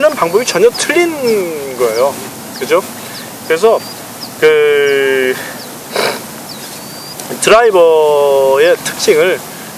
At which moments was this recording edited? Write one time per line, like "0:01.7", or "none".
none

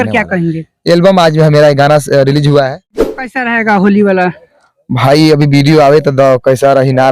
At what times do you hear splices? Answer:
0:03.3

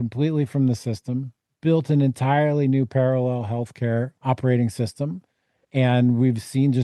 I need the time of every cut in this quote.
0:04.1

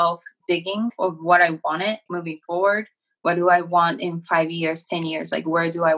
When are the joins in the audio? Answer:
0:00.8
0:02.1

